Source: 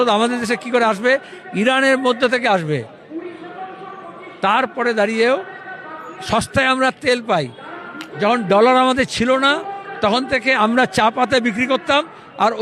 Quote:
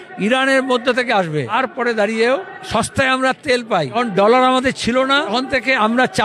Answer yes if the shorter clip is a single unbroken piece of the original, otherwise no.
no